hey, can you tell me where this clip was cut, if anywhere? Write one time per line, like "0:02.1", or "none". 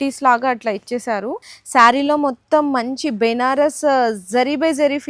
0:01.5